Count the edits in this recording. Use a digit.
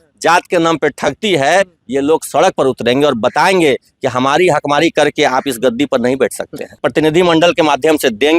1